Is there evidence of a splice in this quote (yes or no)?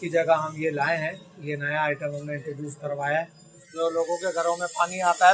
yes